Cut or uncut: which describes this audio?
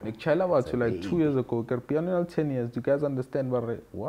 uncut